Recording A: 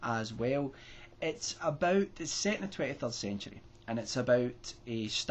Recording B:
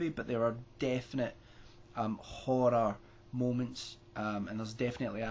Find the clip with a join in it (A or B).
B